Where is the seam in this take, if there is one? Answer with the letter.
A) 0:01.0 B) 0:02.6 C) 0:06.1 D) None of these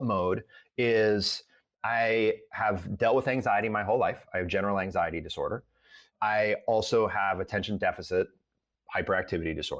C